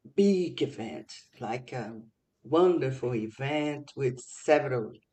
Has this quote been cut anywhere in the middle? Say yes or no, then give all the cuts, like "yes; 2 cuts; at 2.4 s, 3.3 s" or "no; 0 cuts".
no; 0 cuts